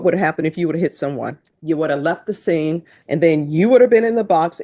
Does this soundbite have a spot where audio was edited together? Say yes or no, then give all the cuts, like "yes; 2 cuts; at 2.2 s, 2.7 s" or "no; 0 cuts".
yes; 2 cuts; at 1.5 s, 2.9 s